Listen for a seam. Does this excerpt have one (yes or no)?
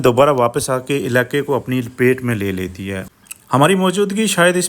yes